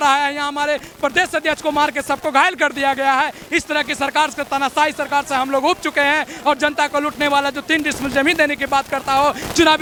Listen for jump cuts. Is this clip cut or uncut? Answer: uncut